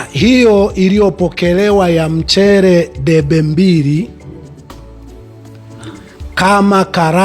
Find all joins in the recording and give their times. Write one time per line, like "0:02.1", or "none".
0:04.1
0:05.6